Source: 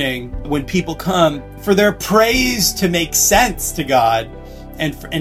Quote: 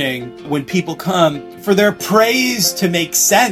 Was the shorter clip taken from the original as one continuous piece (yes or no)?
yes